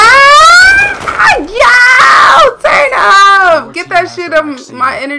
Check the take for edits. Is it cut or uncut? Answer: cut